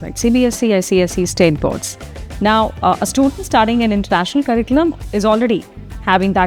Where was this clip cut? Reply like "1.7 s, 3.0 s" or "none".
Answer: none